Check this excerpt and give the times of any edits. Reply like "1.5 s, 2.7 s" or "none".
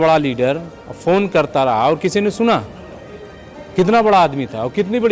none